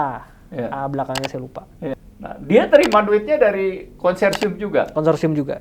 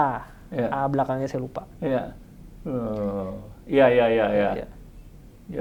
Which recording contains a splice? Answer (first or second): first